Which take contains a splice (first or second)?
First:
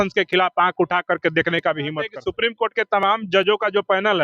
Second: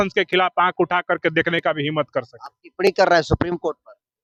first